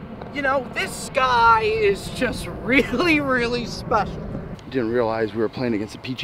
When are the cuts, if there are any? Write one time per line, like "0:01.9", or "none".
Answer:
0:04.5